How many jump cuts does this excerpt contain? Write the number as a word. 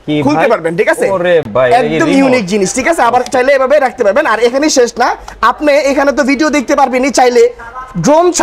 zero